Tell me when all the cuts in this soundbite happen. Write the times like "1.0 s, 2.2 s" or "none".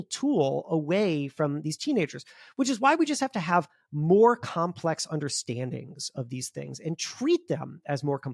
none